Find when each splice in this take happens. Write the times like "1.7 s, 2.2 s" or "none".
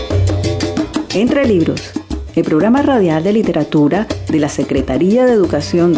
1.1 s